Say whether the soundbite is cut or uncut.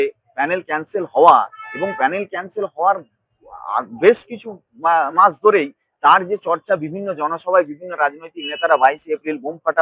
uncut